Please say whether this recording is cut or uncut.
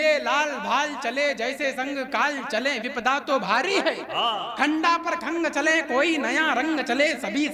uncut